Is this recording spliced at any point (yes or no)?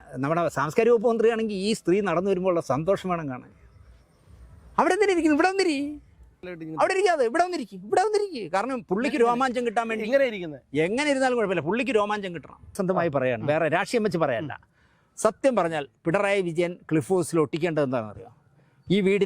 yes